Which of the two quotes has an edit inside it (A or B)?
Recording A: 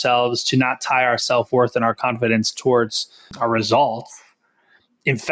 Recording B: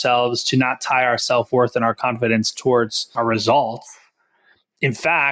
B